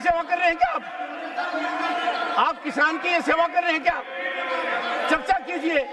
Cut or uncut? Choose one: uncut